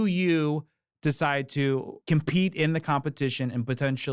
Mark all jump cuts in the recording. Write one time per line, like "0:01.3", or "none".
0:02.0